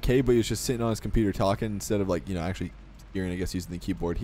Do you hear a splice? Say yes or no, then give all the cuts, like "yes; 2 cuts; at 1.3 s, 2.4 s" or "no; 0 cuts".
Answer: no; 0 cuts